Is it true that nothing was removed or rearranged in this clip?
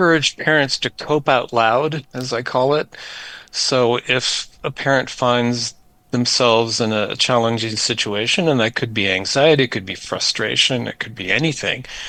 yes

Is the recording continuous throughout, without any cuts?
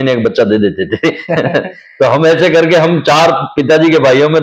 yes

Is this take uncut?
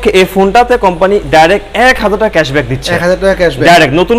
yes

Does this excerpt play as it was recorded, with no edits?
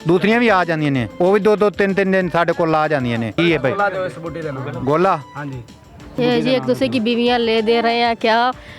no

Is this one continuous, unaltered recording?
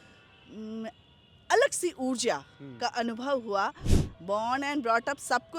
no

